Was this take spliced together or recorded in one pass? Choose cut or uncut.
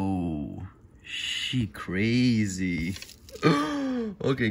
uncut